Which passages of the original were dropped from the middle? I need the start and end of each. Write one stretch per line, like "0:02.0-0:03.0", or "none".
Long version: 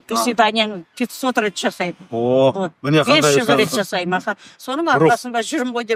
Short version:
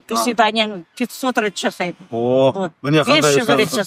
none